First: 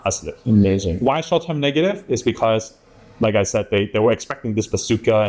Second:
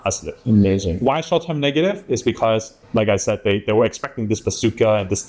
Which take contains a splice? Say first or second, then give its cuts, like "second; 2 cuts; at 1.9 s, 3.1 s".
second; 1 cut; at 2.8 s